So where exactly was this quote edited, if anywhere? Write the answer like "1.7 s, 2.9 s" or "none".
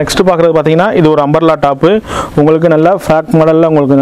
none